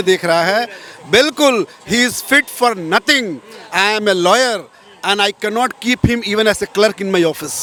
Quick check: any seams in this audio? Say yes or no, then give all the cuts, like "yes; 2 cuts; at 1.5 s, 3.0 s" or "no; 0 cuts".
no; 0 cuts